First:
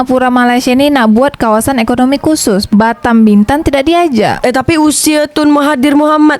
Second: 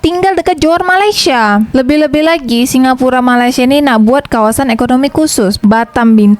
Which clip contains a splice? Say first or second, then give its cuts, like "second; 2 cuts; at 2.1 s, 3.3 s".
first; 1 cut; at 4.4 s